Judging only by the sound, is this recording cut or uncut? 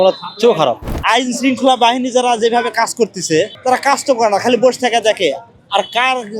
cut